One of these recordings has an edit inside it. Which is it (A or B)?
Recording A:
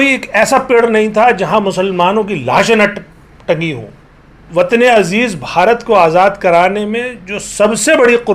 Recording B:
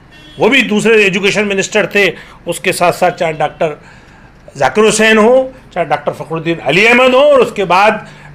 A